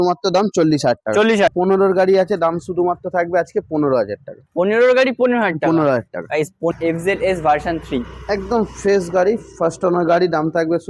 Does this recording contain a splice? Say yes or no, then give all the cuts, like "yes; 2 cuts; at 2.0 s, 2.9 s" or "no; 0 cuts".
yes; 2 cuts; at 1.5 s, 6.7 s